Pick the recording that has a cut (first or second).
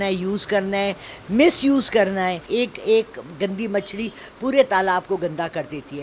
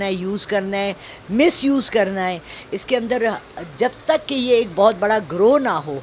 first